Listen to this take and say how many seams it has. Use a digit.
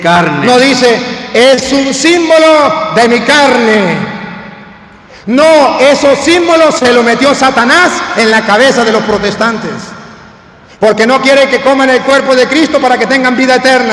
0